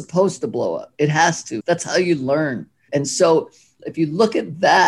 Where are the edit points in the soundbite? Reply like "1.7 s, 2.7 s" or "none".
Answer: 1.5 s, 2.8 s, 3.7 s

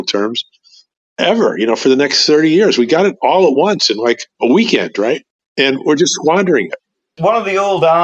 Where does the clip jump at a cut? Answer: 5.4 s, 7.0 s

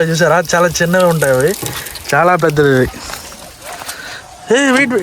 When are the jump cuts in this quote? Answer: none

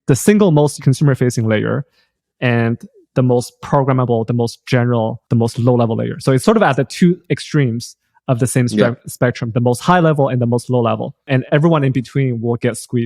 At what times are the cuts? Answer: 0.7 s, 5.2 s, 6.4 s, 11.4 s

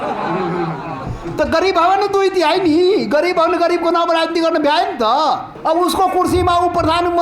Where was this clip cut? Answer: 5.5 s

